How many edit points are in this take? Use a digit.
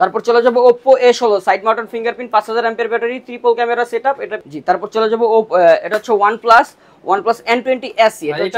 1